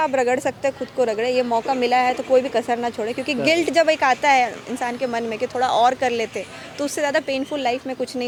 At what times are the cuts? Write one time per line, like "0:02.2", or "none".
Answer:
none

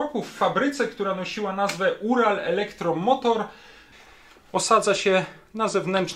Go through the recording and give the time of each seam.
0:03.9

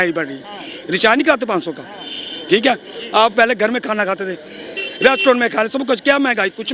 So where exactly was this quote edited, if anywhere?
none

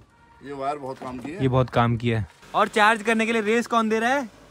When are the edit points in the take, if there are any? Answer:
0:02.4

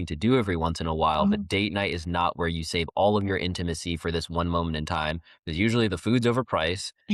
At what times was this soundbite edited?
none

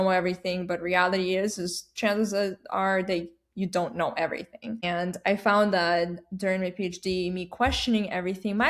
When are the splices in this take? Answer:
0:04.8

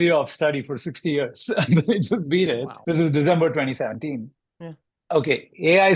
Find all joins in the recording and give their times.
0:02.7

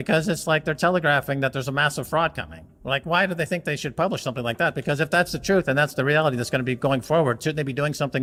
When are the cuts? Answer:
none

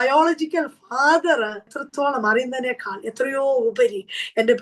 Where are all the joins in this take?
0:01.8

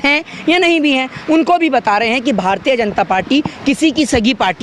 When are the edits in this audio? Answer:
none

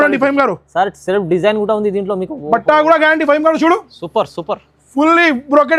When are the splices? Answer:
none

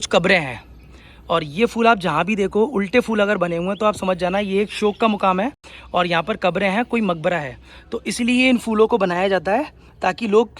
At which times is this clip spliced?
none

